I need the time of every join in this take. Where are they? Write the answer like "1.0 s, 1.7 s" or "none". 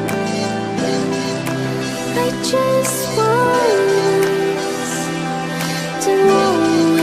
4.0 s

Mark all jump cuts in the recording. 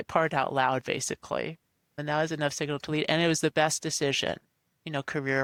none

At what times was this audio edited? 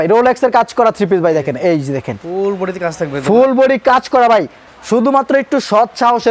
none

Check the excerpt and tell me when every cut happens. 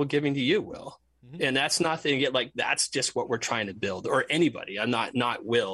none

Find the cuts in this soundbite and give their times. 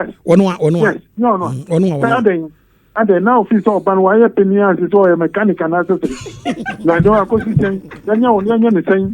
1.9 s

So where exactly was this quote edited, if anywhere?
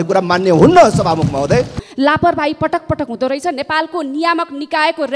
1.8 s

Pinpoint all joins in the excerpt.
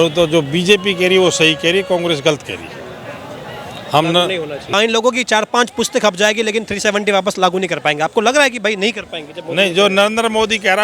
4.6 s

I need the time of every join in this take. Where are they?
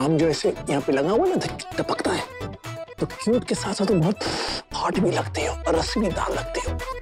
none

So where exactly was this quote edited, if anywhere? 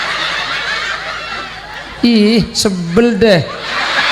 1.7 s

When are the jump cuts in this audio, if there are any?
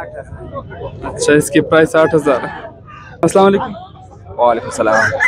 3.1 s

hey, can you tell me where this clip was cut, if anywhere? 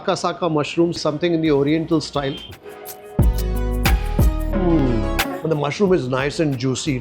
2.5 s, 5.3 s

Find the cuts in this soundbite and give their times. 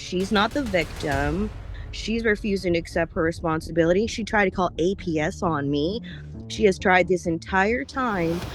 1.7 s

